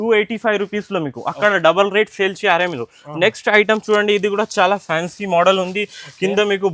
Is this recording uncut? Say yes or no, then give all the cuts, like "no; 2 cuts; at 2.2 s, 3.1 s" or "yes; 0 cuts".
yes; 0 cuts